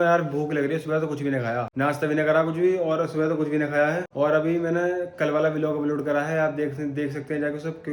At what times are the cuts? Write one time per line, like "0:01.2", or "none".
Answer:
none